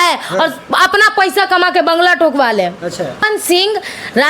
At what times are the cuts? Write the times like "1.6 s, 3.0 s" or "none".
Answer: 3.2 s